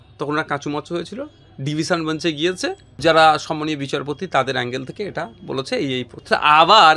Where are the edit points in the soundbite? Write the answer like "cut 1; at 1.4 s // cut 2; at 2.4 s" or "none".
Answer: cut 1; at 2.9 s // cut 2; at 6.1 s